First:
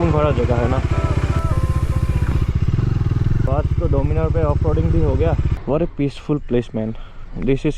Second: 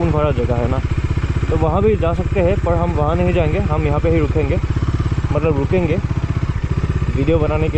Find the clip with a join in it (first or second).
first